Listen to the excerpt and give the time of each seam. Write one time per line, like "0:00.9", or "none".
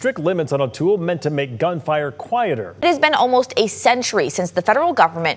none